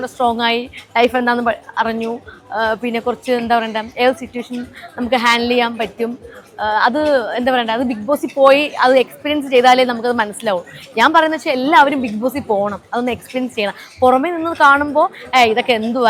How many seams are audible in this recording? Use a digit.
0